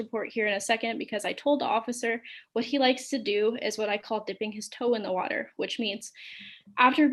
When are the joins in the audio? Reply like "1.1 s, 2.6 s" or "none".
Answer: none

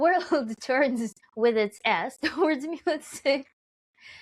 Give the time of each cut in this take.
1.2 s

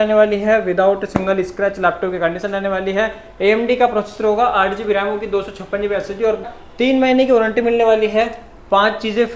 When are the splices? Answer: 6.4 s

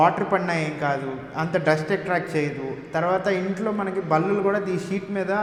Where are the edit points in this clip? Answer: none

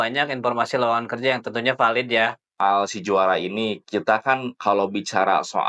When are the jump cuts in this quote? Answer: 2.6 s

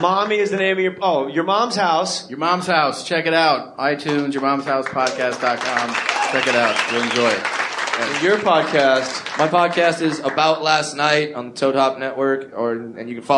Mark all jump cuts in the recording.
11.8 s

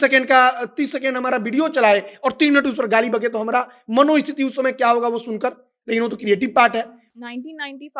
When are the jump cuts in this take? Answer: 7.0 s

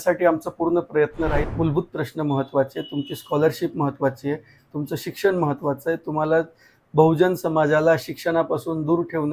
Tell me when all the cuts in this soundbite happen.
1.4 s

